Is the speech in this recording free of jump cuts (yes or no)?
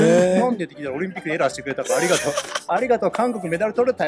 yes